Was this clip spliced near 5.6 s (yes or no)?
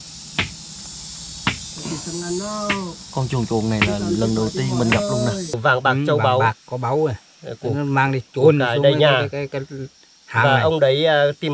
yes